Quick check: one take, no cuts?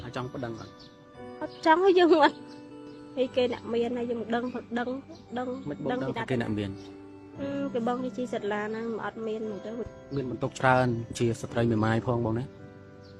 no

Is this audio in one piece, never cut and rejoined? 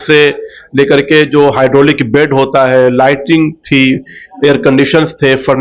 yes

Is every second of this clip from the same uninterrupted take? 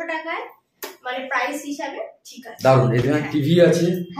yes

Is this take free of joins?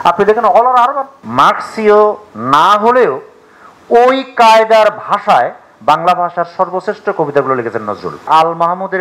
no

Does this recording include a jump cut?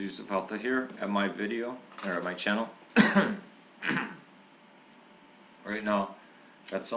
no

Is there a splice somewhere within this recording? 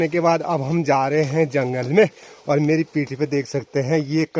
no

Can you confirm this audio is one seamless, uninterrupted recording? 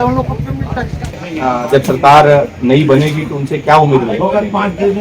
no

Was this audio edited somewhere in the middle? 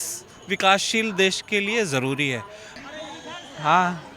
yes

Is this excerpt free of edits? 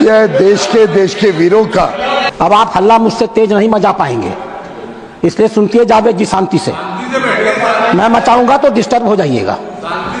no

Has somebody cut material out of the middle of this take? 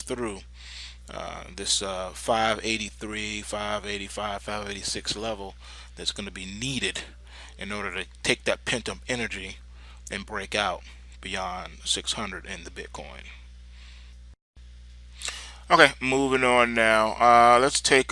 no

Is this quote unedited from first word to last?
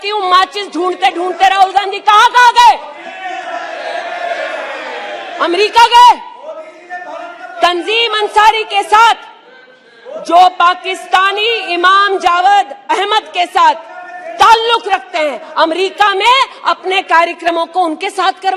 yes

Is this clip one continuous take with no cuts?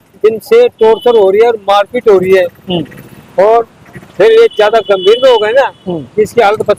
yes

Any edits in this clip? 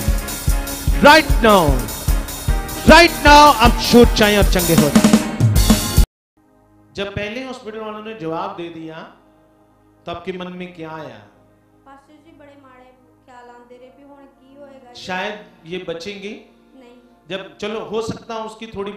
yes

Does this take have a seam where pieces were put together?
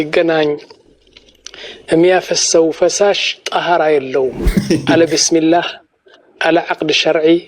yes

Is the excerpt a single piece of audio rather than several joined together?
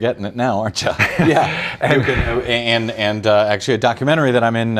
yes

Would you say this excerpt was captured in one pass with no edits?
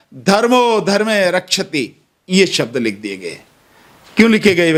yes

